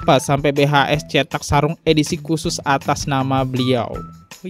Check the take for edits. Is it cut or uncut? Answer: uncut